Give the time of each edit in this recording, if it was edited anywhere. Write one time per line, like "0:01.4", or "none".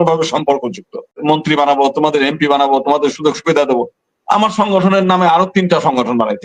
0:01.2